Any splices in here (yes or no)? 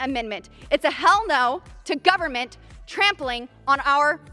no